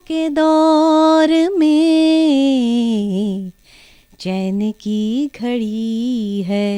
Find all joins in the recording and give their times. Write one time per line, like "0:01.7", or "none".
none